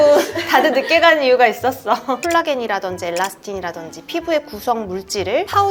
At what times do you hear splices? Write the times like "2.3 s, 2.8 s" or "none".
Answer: 2.2 s